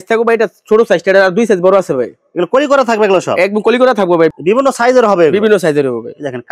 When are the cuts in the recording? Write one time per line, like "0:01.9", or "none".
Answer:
0:04.4